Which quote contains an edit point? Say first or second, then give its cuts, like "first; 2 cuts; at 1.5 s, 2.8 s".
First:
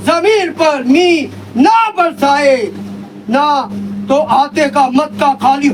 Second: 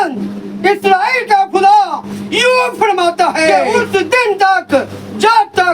second; 1 cut; at 3.7 s